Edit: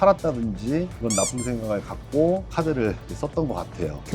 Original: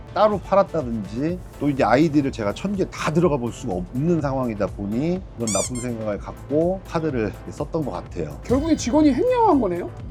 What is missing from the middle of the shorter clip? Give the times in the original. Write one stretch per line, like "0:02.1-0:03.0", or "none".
0:01.5-0:05.3